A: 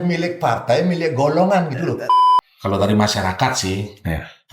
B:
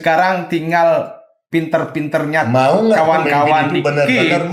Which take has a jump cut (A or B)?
A